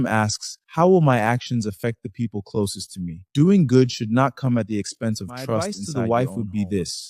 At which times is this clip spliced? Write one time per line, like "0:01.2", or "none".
0:05.8